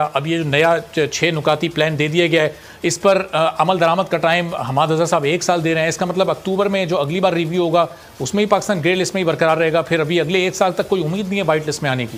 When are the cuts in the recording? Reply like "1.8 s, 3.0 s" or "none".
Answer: none